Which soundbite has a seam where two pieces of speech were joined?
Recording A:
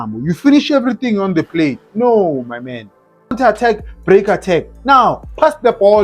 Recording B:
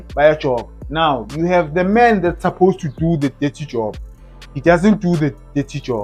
A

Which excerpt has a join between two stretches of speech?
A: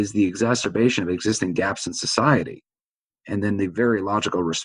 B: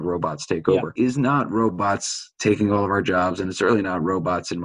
B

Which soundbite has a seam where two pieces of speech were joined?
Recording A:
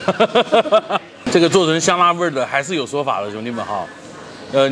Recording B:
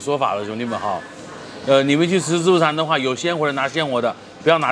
A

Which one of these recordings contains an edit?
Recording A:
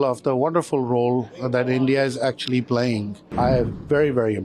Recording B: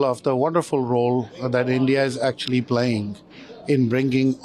A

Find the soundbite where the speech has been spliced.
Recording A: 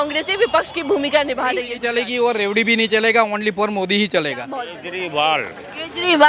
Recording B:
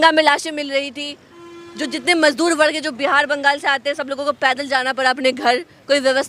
A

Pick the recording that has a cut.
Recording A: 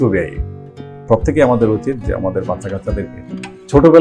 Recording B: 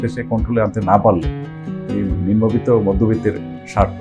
A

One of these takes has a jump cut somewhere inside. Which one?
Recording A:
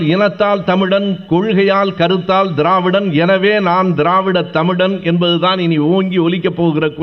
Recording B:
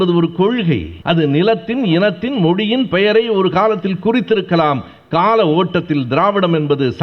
B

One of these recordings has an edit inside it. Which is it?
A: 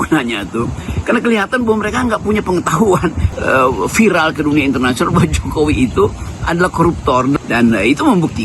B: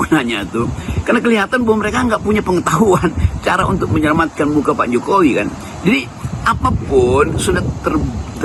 A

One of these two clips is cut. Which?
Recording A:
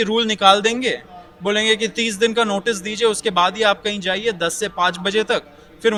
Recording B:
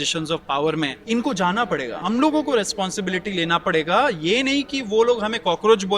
B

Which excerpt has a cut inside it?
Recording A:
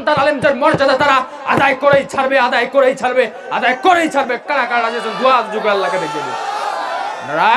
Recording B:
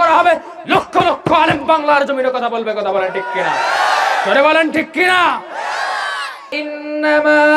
B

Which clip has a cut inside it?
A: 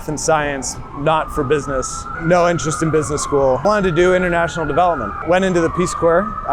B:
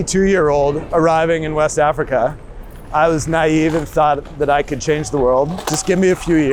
A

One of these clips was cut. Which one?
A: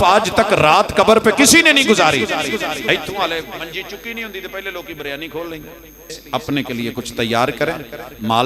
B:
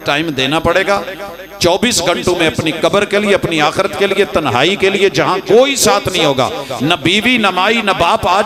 A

